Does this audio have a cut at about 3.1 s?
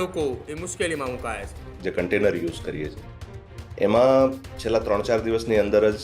no; 1 cut; at 1.7 s

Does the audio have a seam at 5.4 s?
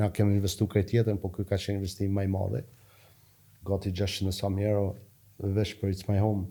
no; 0 cuts

